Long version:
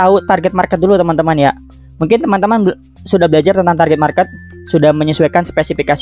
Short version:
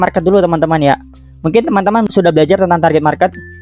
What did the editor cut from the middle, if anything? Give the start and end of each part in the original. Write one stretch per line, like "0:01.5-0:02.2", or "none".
0:02.6-0:03.0